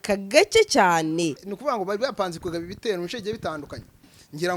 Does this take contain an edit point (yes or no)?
yes